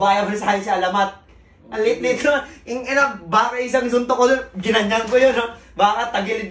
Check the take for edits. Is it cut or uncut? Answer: uncut